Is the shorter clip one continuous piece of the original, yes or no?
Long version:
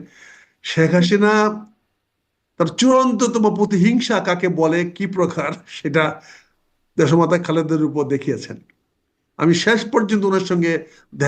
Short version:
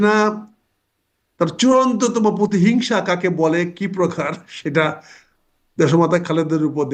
yes